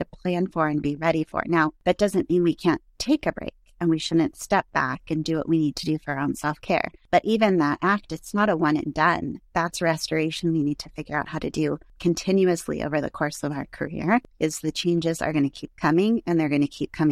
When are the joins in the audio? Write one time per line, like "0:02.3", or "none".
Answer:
0:01.8
0:07.0
0:11.9
0:14.3